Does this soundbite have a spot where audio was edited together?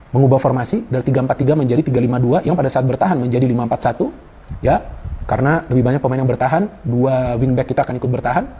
no; 0 cuts

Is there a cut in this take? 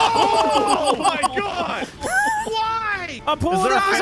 yes; 1 cut; at 3.1 s

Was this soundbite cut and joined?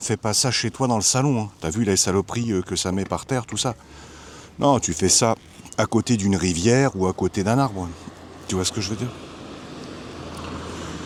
no; 0 cuts

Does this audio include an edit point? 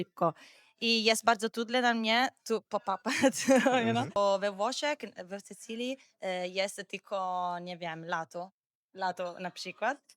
yes; 1 cut; at 4.2 s

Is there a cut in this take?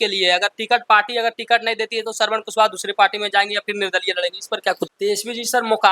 yes; 1 cut; at 4.9 s

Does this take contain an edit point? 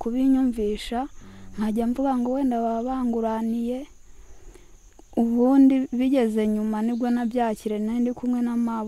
no; 0 cuts

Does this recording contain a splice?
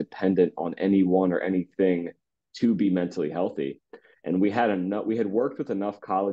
no; 0 cuts

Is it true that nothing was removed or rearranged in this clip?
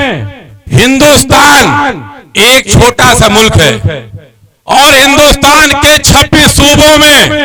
yes; 0 cuts

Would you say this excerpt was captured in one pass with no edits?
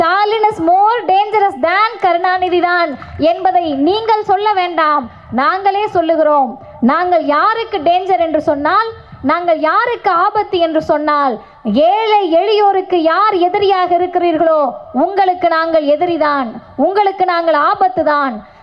yes; 0 cuts

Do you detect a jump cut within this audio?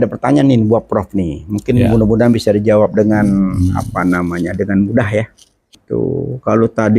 yes; 1 cut; at 5.8 s

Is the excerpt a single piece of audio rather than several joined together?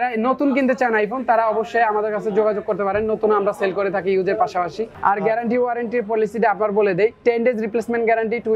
no; 1 cut; at 4.9 s

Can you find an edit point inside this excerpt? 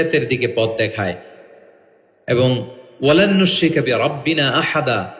no; 0 cuts

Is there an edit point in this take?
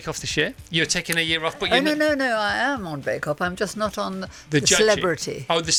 no; 0 cuts

